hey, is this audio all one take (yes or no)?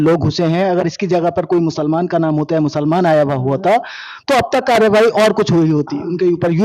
yes